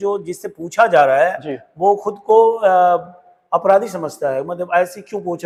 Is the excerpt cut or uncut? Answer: uncut